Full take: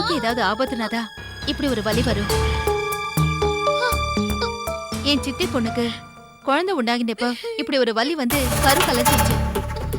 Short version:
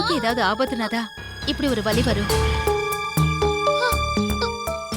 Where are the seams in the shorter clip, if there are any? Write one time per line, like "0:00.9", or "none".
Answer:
none